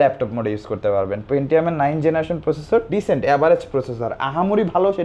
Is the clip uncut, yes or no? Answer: yes